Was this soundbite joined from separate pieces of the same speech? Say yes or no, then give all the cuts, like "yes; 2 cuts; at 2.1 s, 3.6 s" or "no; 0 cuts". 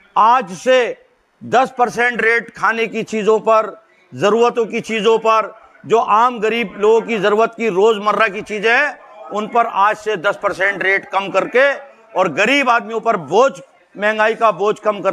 no; 0 cuts